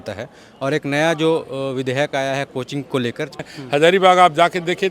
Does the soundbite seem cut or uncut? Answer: cut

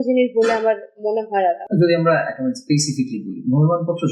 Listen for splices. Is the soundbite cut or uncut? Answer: cut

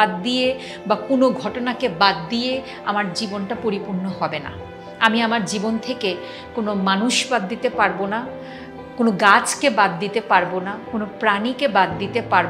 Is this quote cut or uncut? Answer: uncut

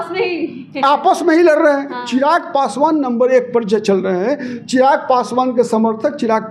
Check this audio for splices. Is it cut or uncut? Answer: cut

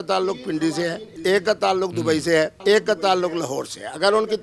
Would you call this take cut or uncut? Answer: cut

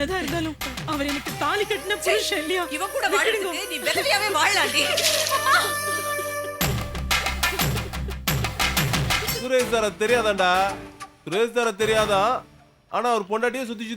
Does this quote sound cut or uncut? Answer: cut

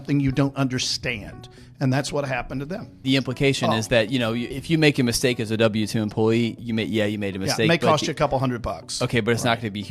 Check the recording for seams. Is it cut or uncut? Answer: cut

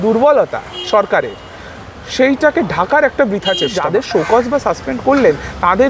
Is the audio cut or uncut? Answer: cut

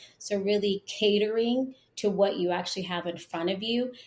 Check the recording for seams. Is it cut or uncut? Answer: uncut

